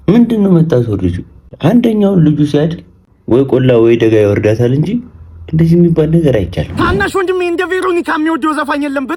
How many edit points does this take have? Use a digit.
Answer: 1